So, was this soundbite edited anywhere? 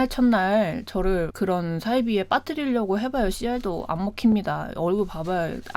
no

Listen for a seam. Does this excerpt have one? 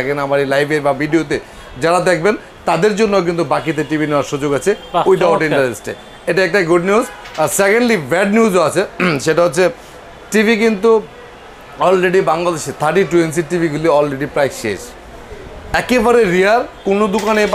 no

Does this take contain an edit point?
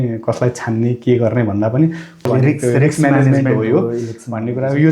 yes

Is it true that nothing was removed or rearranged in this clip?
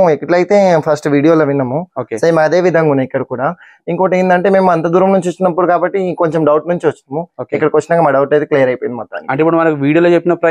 yes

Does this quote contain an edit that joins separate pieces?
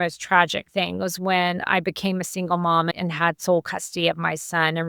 yes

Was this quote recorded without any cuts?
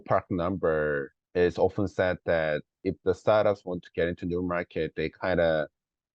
no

